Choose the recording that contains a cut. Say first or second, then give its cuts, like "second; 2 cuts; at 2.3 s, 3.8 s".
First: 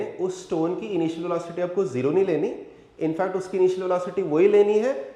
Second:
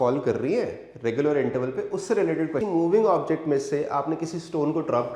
second; 1 cut; at 2.6 s